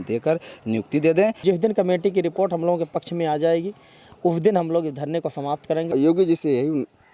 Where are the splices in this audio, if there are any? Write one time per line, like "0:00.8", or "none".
0:01.4
0:05.9